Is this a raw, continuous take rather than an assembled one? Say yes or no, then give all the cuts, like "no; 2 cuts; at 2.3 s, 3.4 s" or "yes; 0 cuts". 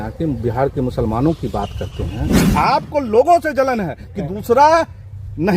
no; 1 cut; at 2.4 s